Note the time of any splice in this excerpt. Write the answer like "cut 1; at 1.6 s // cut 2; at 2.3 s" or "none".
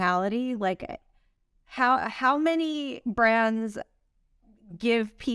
none